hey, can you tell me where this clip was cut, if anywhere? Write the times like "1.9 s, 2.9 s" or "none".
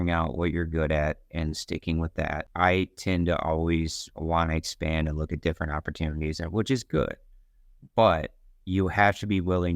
2.5 s